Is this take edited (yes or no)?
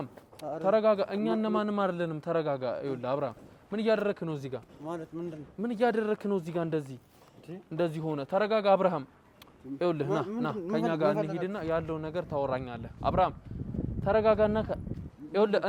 no